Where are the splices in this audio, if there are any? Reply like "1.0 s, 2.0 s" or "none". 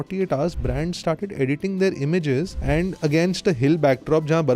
2.6 s